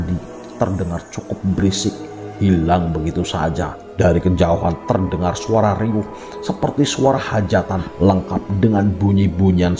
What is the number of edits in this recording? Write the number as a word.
two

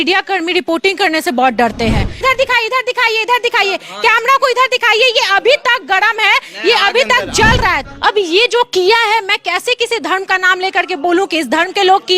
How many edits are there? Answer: two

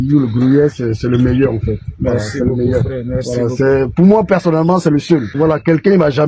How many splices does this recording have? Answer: one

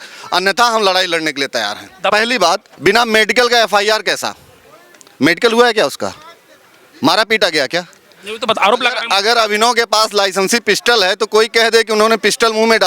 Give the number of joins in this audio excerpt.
one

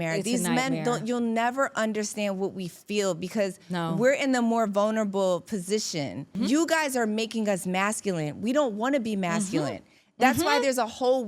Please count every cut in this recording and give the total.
one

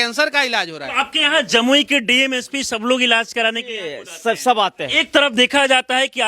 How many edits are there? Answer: two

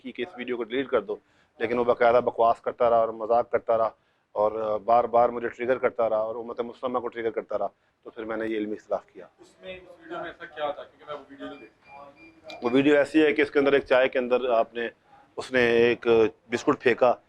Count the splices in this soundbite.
zero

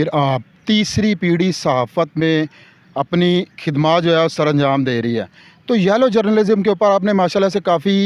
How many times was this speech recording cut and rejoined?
zero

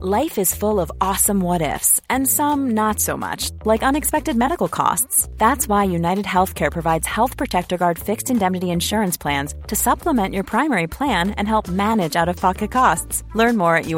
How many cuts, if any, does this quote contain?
zero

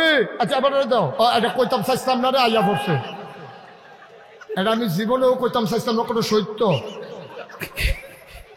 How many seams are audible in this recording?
one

